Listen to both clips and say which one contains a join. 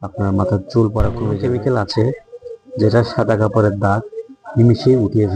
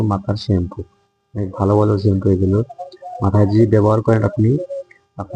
first; 1 cut; at 1.3 s

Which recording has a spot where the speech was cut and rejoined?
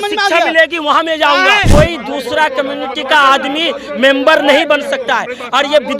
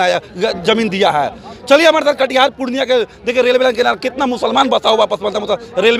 first; 1 cut; at 1.7 s

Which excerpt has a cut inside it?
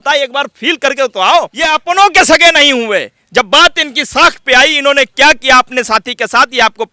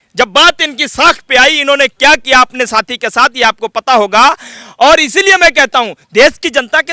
first; 1 cut; at 1.6 s

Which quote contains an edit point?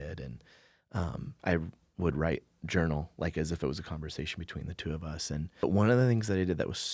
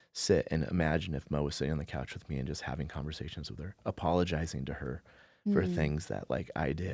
first; 1 cut; at 5.6 s

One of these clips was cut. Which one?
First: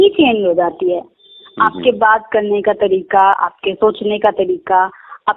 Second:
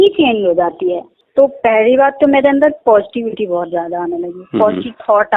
second; 1 cut; at 1.1 s

